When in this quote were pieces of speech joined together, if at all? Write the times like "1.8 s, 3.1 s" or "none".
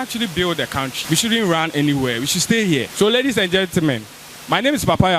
1.0 s, 2.9 s